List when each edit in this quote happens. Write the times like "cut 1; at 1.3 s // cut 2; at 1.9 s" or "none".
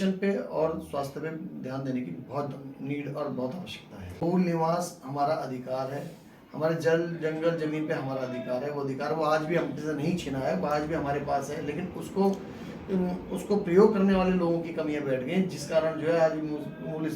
cut 1; at 4.2 s